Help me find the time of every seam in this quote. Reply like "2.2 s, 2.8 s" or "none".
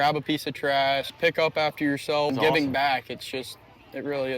1.1 s, 2.3 s